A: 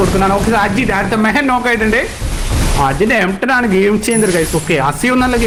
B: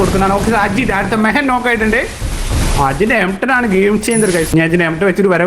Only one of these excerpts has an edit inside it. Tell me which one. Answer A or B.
B